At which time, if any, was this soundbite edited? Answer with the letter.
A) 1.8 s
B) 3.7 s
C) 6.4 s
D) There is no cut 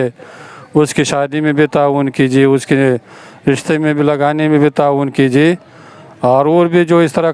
D